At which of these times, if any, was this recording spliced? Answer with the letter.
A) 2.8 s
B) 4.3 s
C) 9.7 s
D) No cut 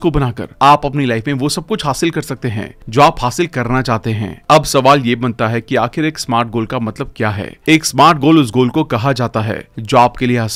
D